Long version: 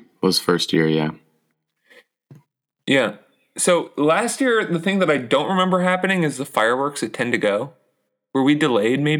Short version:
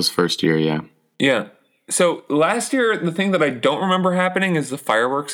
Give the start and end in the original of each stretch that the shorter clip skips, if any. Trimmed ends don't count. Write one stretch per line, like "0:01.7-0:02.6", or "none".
0:01.3-0:02.7